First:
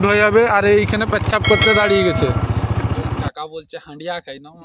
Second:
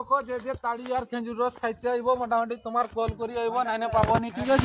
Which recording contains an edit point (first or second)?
first